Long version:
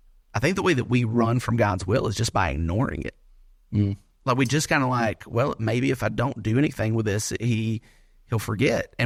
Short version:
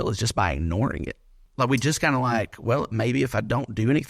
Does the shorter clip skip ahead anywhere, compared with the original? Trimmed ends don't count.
yes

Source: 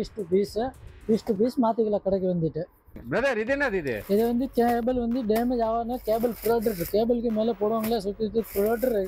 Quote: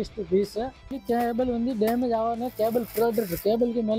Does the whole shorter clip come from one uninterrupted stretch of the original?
no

